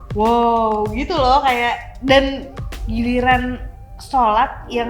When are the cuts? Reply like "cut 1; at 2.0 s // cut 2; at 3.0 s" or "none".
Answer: cut 1; at 2.7 s